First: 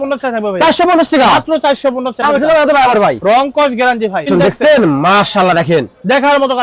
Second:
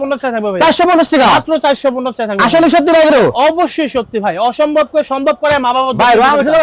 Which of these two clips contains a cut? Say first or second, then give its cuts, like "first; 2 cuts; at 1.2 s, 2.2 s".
first; 2 cuts; at 2.2 s, 4.3 s